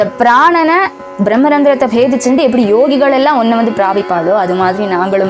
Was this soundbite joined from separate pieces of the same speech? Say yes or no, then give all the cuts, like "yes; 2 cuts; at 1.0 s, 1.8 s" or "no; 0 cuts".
yes; 1 cut; at 1.1 s